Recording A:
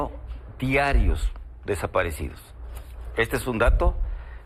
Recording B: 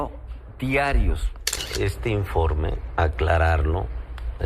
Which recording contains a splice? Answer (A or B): B